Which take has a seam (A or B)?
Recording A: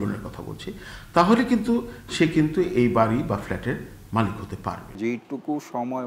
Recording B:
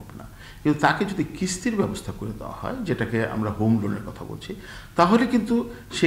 A